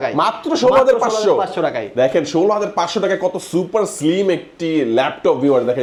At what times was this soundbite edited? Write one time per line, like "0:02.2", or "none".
none